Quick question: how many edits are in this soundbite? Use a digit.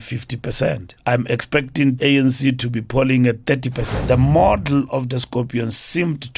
3